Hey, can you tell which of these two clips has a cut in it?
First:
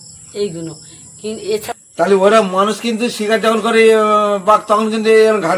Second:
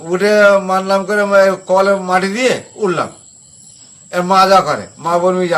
first; 1 cut; at 1.7 s

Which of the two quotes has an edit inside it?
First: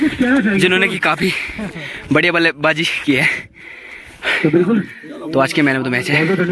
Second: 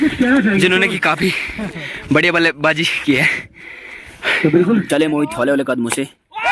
second; 1 cut; at 4.9 s

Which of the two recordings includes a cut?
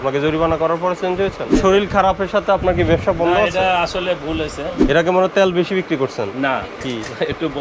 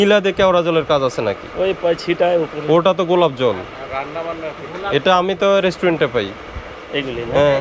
first; 2 cuts; at 1.5 s, 4.7 s

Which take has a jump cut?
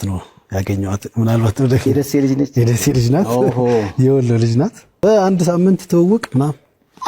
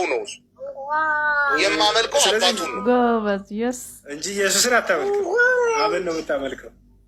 first; 1 cut; at 5.0 s

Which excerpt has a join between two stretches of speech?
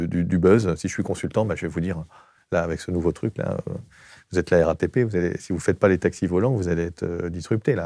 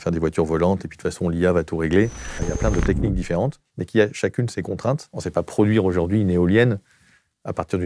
second; 2 cuts; at 2.5 s, 5.1 s

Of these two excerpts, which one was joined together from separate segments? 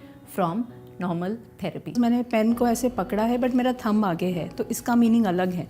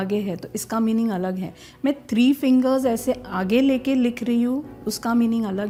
first; 1 cut; at 1.9 s

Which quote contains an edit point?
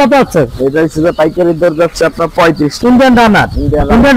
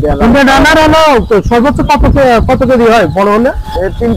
first; 1 cut; at 2.7 s

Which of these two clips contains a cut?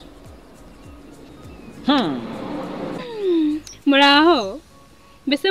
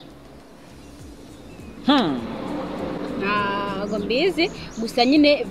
first; 1 cut; at 3.0 s

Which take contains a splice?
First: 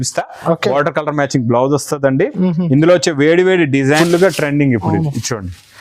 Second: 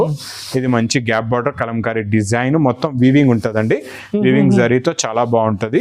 first; 1 cut; at 4.0 s

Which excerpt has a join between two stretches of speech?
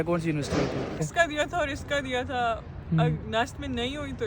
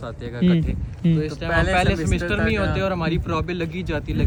first; 1 cut; at 1.0 s

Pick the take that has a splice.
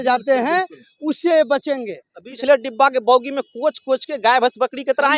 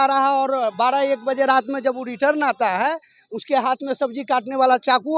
first; 1 cut; at 2.2 s

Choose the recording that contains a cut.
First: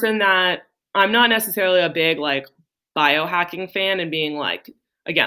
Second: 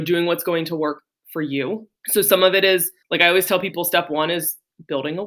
second; 2 cuts; at 1.4 s, 3.0 s

